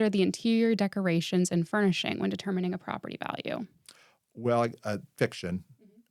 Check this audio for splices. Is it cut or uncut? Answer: uncut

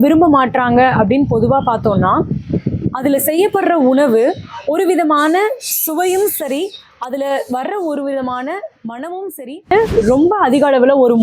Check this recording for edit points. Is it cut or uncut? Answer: cut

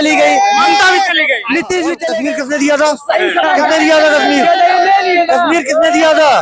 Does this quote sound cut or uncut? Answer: cut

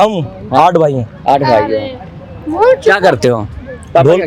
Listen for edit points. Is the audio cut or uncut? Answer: uncut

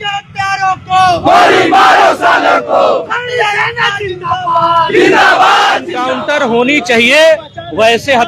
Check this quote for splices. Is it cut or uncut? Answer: cut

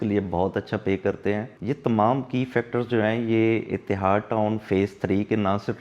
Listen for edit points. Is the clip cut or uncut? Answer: cut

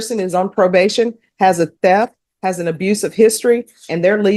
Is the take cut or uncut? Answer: uncut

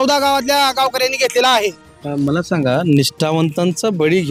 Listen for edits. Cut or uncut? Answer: uncut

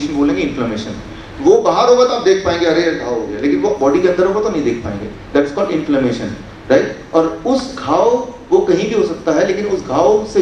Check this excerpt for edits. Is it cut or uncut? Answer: uncut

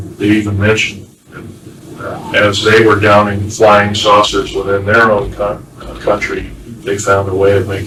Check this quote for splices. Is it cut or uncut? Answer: uncut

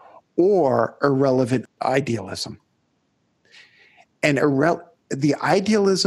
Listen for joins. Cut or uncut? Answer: uncut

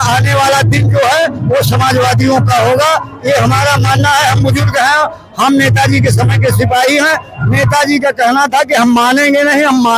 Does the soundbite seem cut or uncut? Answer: uncut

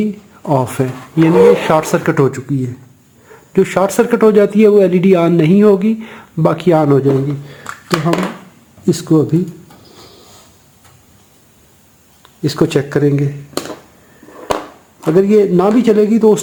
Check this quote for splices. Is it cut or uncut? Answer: uncut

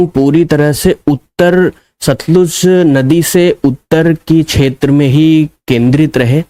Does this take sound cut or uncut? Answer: uncut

